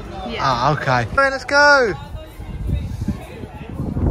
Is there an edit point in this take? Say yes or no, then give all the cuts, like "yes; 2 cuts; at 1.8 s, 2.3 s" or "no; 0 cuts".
yes; 1 cut; at 1.2 s